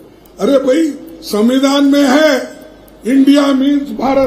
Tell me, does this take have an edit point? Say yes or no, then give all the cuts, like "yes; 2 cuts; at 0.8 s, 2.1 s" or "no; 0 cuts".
no; 0 cuts